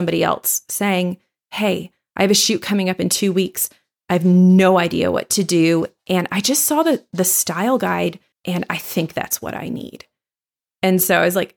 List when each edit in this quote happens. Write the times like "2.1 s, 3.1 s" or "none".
8.3 s